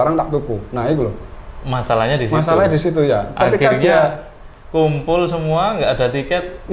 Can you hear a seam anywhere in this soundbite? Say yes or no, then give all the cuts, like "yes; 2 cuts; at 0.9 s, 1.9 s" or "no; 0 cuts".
no; 0 cuts